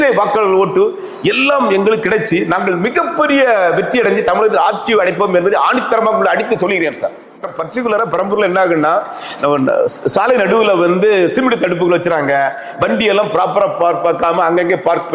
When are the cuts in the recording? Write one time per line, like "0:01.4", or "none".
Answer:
0:07.5